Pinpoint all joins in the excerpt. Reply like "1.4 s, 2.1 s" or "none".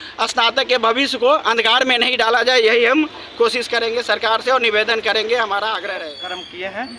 6.0 s